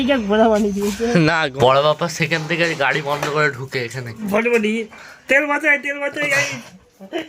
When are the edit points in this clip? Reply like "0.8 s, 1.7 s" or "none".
1.5 s